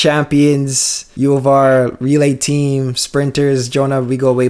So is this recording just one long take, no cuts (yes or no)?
yes